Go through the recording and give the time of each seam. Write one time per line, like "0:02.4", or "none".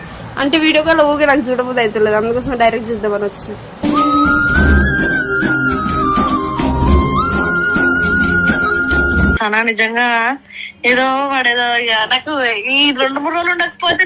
0:09.4